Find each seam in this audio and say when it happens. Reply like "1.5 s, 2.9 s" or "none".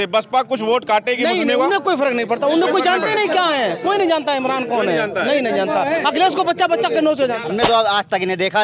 7.4 s